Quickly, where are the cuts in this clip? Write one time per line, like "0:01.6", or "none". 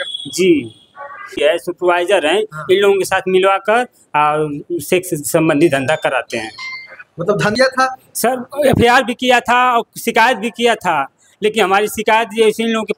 0:01.3
0:07.5

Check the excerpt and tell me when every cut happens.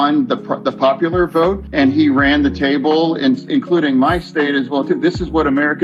0:01.6

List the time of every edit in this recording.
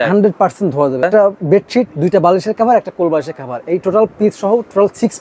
0:01.1

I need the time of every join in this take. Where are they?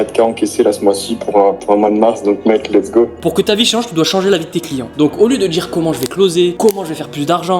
0:03.1

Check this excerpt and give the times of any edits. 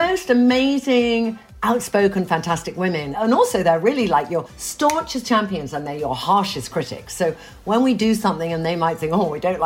0:03.1

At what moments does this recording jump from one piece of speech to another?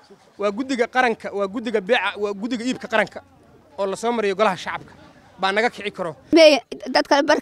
0:06.3

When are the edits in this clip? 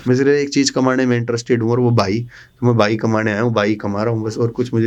none

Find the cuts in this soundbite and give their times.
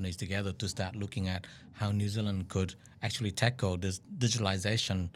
0:04.0

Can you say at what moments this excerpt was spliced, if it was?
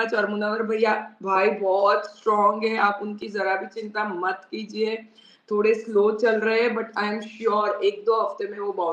none

